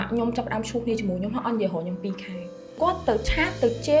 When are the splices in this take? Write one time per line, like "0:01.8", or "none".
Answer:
0:02.8